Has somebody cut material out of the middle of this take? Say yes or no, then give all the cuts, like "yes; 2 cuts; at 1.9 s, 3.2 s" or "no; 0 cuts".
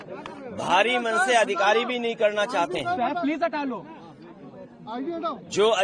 no; 0 cuts